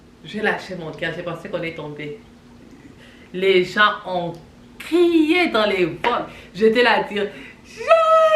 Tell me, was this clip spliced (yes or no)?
no